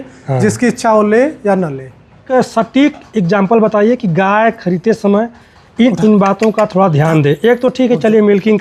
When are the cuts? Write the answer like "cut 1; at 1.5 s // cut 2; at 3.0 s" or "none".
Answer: cut 1; at 2.3 s

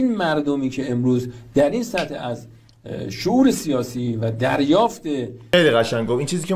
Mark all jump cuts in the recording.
cut 1; at 5.4 s

